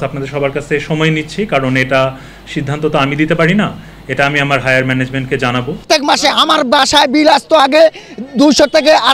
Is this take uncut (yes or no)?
no